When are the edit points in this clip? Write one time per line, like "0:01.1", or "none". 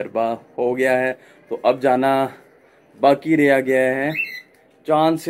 none